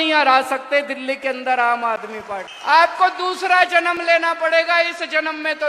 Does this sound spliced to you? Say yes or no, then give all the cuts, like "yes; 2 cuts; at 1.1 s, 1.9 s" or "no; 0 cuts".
yes; 1 cut; at 2.5 s